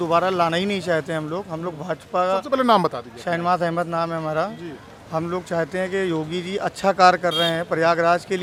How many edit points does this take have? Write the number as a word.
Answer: zero